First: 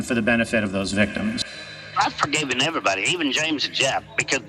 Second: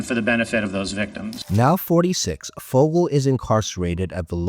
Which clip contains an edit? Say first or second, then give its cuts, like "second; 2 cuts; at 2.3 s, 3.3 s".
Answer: first; 1 cut; at 1.4 s